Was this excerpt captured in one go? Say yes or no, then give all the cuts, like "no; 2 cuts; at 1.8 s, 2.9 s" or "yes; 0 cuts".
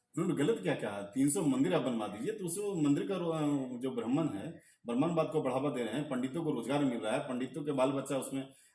yes; 0 cuts